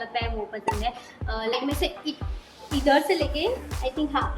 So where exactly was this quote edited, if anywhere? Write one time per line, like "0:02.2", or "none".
0:01.5